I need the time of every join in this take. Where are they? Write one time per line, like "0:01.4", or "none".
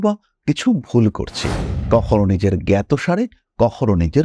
none